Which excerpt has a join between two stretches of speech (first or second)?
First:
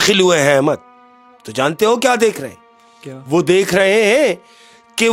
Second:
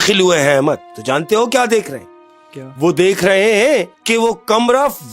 second